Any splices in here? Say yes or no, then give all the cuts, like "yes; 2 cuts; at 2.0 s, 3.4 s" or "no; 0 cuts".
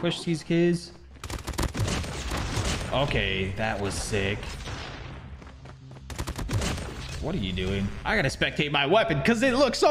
no; 0 cuts